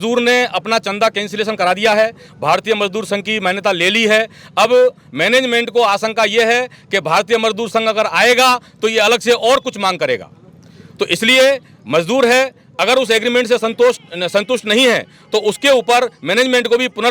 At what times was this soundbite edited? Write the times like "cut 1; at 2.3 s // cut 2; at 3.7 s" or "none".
none